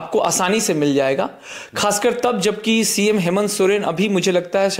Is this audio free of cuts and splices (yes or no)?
yes